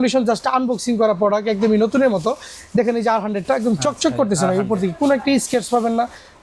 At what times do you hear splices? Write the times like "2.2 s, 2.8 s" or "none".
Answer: none